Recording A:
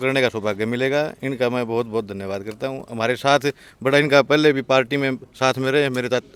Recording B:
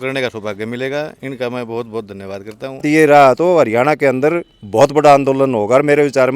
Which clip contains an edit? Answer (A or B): B